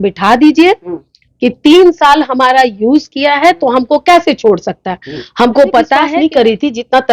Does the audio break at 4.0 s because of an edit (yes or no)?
no